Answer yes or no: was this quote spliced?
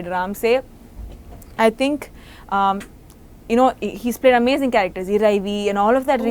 no